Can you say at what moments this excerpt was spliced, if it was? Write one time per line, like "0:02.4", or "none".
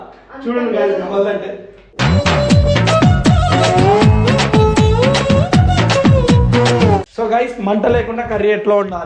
0:07.1

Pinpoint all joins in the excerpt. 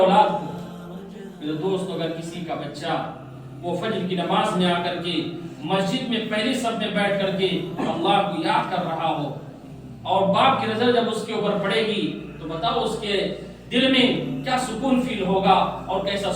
none

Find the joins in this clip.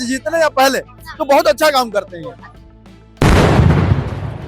none

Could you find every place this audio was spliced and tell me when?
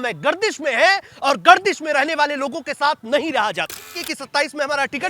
0:04.1

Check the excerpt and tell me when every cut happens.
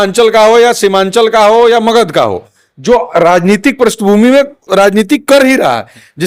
none

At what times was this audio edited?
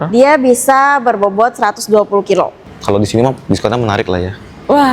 0:02.7

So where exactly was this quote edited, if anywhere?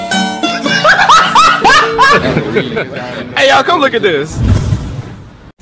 0:02.1

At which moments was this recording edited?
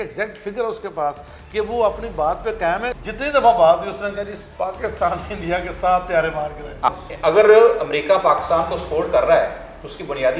0:03.0
0:06.9

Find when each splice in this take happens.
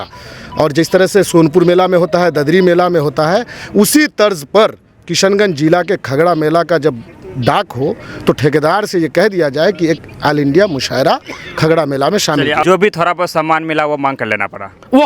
0:12.6

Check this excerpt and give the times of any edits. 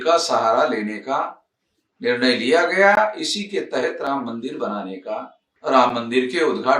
0:05.4

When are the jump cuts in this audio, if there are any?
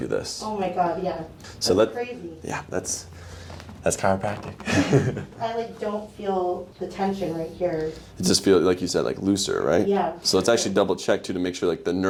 none

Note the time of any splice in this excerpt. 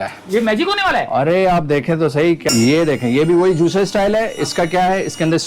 0:02.5

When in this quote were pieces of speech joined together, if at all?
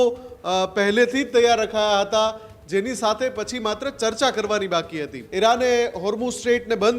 0:05.2

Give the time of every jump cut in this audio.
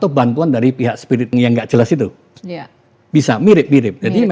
0:01.3

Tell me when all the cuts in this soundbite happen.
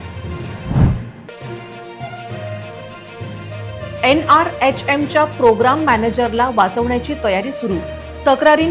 0:01.1

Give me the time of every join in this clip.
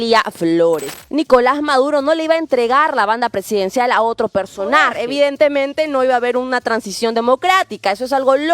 0:00.9
0:05.0

